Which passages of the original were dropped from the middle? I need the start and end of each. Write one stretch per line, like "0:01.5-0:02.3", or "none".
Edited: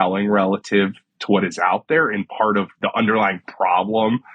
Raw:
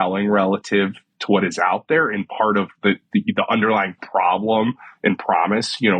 0:02.8-0:03.3